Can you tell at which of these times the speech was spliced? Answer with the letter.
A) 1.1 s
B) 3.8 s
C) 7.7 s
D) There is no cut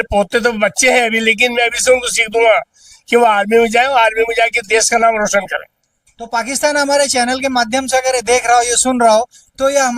D